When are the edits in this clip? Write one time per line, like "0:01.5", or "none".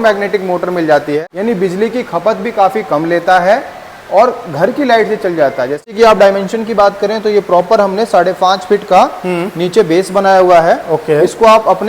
0:01.2
0:05.8

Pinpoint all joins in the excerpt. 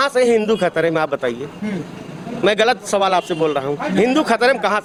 none

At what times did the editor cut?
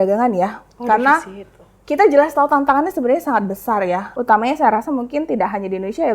0:04.1

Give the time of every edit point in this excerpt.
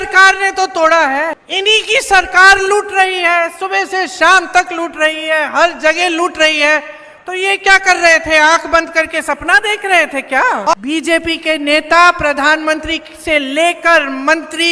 0:01.4
0:10.7

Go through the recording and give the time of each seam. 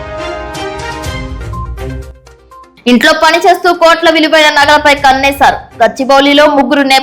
0:01.2

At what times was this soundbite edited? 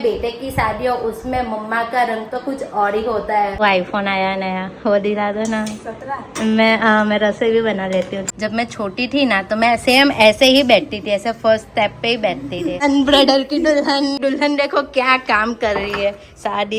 0:03.6
0:08.2
0:12.8
0:14.2

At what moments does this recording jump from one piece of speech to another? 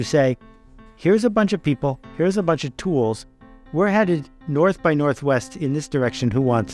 none

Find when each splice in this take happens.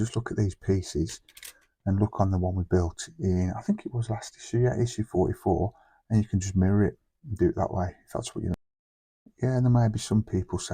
0:08.5

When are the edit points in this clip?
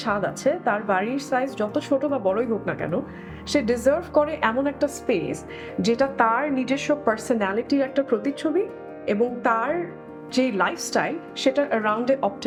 none

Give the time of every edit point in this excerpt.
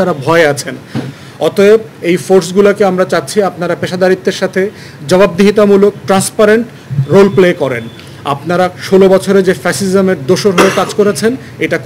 0:01.0

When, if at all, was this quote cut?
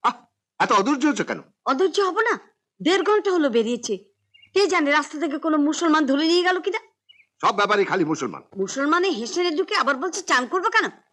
0:08.4

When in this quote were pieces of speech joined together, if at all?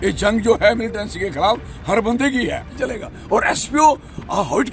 0:02.8

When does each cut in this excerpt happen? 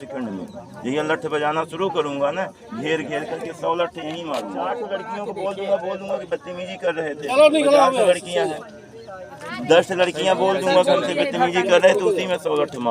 0:04.6

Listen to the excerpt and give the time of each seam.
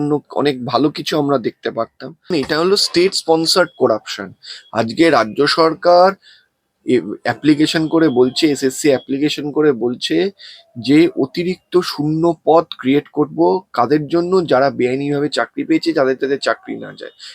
0:02.3

